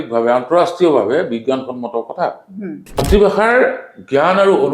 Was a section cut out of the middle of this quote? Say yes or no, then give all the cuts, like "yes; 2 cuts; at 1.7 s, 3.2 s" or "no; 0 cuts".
yes; 1 cut; at 3.0 s